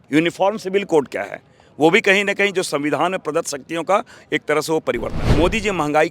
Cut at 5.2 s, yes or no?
yes